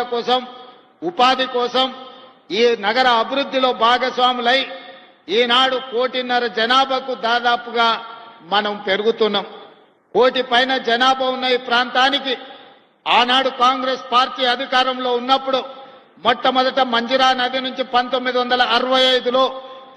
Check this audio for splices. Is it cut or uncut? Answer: uncut